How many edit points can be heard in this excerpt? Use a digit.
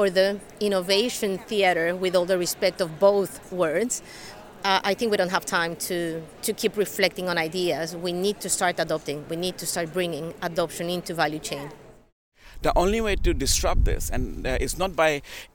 1